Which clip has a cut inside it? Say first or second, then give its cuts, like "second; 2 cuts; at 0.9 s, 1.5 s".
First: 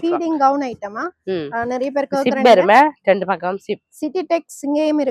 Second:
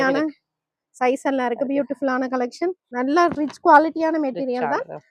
second; 1 cut; at 2.8 s